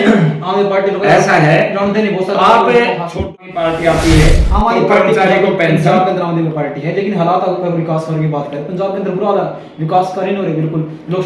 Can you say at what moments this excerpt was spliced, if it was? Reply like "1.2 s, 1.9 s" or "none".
3.3 s

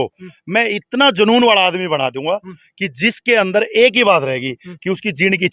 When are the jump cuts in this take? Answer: none

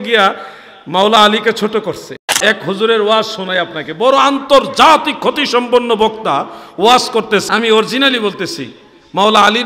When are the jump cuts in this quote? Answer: 2.4 s, 7.4 s

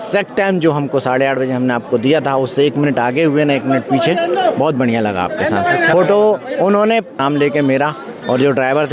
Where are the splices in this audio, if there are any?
7.2 s

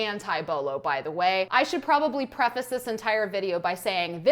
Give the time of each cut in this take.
1.5 s

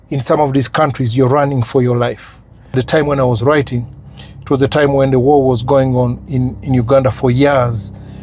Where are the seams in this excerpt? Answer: 2.8 s

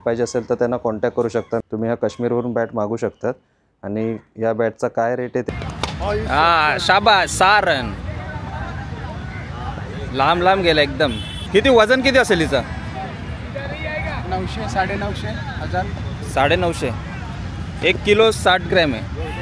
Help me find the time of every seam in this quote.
1.6 s, 5.5 s, 11.3 s

